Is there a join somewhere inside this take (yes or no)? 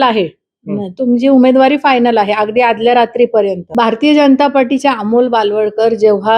yes